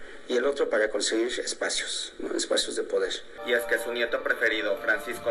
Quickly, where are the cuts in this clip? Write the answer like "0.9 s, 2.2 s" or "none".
3.3 s